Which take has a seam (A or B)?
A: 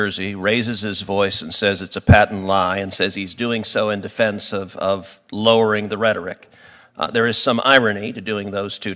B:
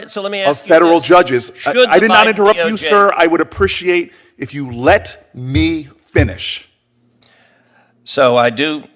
B